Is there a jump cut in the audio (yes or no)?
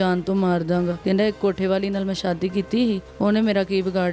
yes